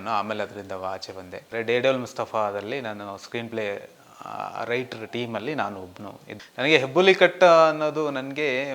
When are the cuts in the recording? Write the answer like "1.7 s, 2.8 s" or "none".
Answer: 1.5 s, 6.3 s